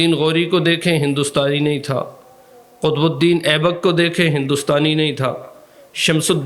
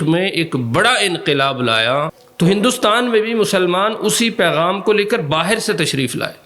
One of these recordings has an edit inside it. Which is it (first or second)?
second